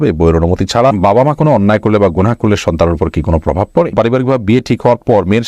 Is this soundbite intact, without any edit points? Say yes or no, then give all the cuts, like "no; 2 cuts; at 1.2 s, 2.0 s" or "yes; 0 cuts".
no; 2 cuts; at 1.0 s, 3.9 s